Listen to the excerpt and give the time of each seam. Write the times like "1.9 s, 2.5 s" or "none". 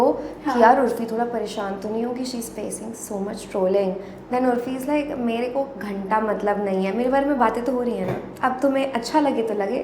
none